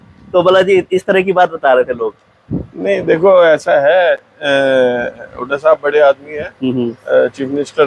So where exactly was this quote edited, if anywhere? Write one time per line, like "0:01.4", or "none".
none